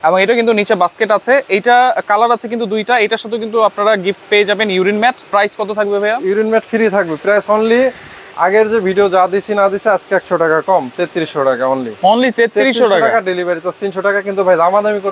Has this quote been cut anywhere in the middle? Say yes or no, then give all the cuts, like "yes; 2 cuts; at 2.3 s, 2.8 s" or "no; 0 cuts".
no; 0 cuts